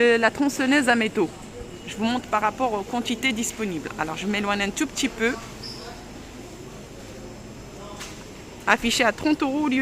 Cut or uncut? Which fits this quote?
uncut